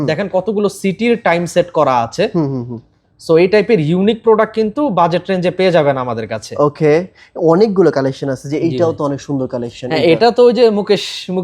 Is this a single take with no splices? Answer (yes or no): yes